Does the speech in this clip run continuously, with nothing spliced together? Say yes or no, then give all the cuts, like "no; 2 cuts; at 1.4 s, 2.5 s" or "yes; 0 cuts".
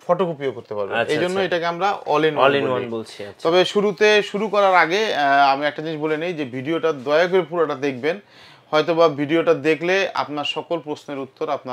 yes; 0 cuts